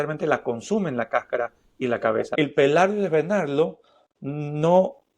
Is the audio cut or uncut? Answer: cut